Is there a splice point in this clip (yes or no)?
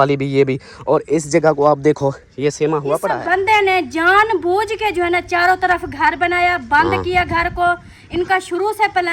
yes